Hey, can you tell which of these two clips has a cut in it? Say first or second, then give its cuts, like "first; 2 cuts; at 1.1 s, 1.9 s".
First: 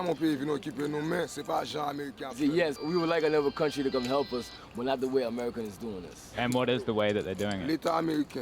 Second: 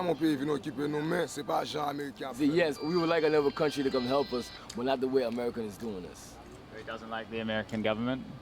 first; 2 cuts; at 6.2 s, 7.6 s